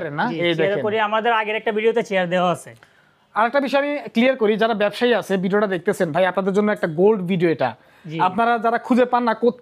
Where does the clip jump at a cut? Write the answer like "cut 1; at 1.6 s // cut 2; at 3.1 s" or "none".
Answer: none